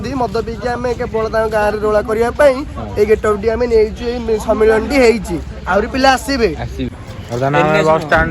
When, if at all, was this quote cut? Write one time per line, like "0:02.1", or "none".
0:07.0